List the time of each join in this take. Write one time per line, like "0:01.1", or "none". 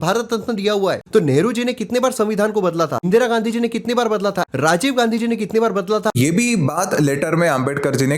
0:01.0
0:03.1
0:04.5
0:06.1